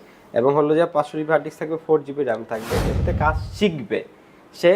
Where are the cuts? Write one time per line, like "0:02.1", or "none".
0:03.0